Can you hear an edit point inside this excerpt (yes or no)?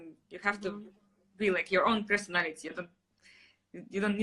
no